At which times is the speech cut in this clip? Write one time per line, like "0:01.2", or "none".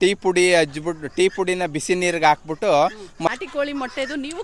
0:03.3